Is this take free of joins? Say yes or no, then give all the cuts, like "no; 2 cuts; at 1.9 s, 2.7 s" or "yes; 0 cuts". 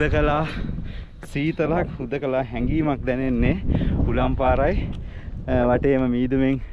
yes; 0 cuts